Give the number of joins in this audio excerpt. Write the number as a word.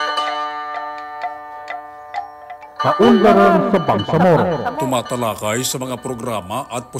one